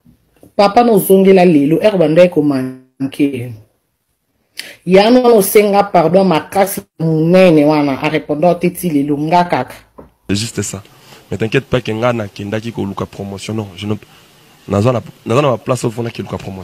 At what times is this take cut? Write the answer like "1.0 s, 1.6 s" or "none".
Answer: 10.2 s